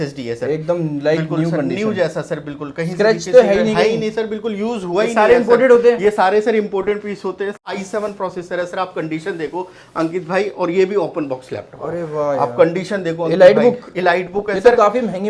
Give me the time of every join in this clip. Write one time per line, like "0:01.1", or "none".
0:07.8